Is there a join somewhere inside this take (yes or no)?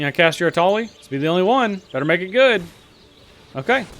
yes